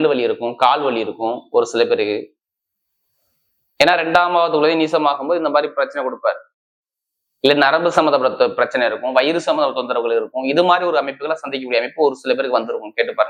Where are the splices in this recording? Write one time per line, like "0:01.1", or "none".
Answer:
none